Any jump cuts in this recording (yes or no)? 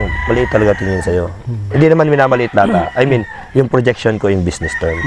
no